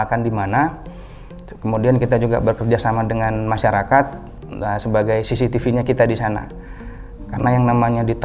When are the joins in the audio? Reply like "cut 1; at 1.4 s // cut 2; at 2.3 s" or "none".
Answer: none